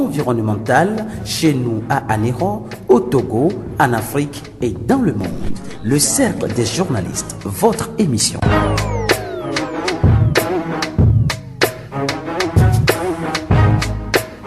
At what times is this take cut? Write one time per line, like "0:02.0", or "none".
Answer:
0:08.5